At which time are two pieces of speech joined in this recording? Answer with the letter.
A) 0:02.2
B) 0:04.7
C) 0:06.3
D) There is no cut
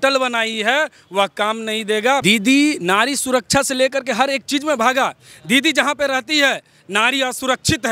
A